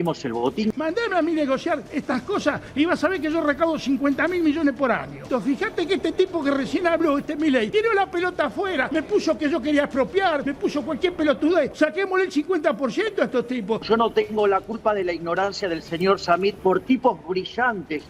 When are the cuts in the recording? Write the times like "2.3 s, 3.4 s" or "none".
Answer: 0.7 s, 5.2 s, 7.7 s, 8.9 s, 10.5 s, 11.7 s, 13.8 s, 16.6 s